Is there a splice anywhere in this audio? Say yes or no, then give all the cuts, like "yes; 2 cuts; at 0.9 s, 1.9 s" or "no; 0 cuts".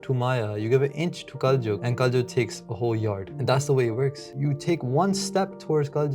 yes; 3 cuts; at 1.9 s, 3.3 s, 4.3 s